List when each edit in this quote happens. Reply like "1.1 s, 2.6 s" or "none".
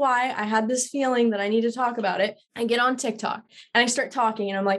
2.4 s, 3.5 s